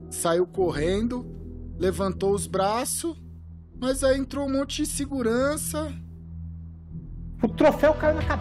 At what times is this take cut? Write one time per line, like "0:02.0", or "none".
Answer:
none